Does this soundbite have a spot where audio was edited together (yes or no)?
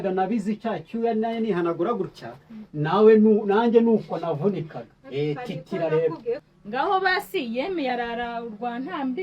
yes